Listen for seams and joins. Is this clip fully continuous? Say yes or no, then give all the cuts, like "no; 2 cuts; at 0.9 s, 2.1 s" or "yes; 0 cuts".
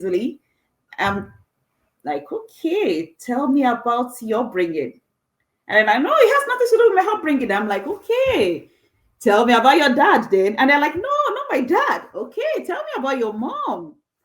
yes; 0 cuts